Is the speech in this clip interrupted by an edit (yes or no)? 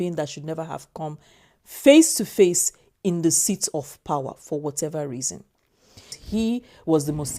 yes